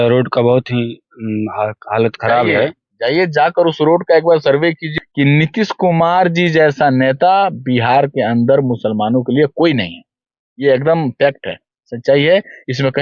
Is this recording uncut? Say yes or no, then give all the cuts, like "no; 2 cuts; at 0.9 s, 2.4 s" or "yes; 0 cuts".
no; 1 cut; at 4.9 s